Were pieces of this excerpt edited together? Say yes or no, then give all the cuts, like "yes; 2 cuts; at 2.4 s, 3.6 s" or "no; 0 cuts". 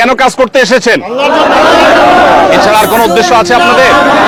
no; 0 cuts